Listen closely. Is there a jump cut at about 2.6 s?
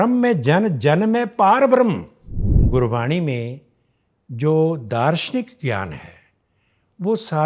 yes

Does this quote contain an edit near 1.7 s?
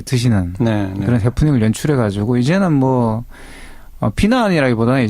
yes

